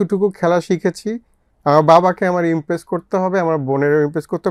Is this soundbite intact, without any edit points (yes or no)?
yes